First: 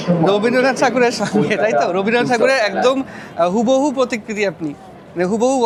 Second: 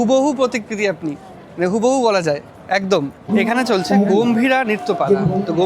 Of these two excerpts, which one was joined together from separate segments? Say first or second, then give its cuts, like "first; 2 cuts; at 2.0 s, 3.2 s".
second; 1 cut; at 3.2 s